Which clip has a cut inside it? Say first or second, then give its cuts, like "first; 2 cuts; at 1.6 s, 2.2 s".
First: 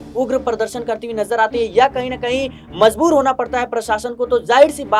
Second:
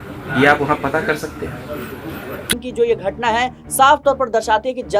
second; 1 cut; at 2.4 s